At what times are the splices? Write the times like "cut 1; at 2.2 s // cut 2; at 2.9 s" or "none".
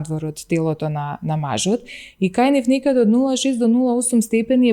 none